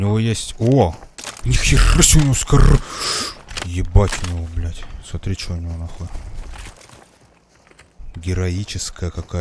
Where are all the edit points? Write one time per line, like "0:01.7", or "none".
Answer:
none